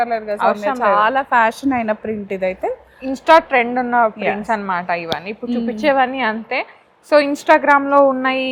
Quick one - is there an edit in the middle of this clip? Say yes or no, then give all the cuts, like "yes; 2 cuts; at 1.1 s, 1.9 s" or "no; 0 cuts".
no; 0 cuts